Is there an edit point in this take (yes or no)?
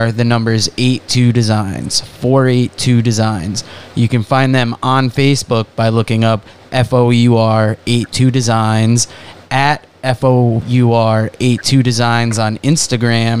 yes